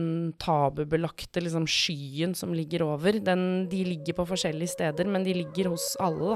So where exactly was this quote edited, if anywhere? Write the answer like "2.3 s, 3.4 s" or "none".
none